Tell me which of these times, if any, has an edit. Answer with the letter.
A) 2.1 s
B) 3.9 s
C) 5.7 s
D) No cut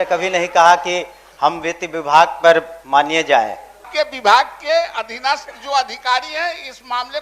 B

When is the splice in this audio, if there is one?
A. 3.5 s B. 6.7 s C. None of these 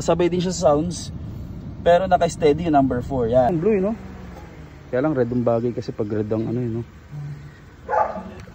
A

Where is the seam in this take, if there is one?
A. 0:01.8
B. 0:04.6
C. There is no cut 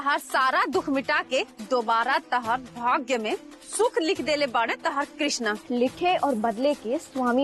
C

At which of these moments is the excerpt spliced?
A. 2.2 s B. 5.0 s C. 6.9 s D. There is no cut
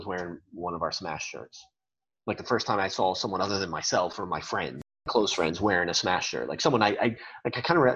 B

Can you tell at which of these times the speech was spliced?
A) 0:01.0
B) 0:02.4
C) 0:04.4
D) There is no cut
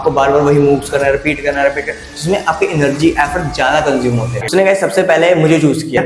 C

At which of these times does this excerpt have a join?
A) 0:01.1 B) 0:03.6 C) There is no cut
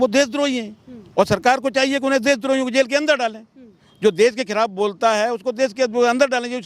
C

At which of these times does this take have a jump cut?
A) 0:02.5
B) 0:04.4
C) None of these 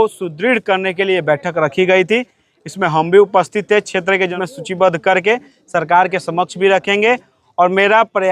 B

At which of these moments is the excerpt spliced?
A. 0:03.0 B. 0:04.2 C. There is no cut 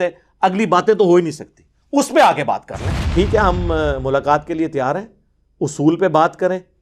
A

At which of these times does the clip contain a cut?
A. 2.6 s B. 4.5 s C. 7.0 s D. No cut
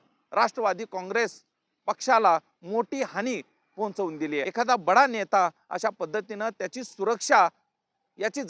B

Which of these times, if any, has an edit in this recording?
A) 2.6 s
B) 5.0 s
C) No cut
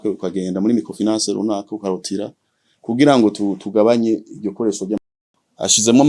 B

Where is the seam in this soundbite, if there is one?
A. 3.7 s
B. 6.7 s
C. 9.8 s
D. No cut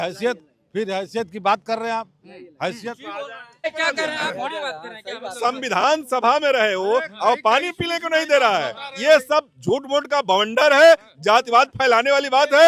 A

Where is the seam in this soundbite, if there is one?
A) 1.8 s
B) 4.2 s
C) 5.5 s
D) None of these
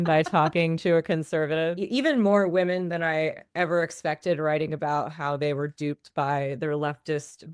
A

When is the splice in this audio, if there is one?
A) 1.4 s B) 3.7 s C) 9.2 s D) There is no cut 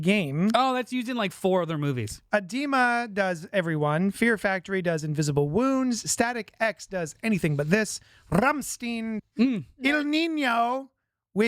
C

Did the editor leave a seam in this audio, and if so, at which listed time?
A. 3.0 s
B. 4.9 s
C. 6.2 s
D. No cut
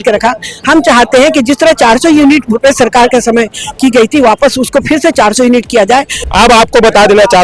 C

